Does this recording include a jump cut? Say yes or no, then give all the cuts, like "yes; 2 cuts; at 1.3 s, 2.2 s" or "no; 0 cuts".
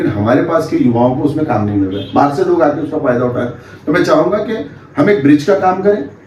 no; 0 cuts